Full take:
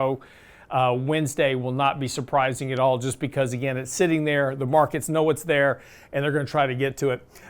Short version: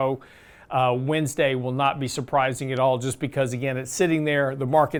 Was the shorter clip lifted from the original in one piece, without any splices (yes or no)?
yes